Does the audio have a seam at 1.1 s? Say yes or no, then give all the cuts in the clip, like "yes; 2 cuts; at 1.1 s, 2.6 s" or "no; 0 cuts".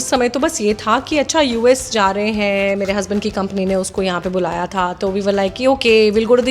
no; 0 cuts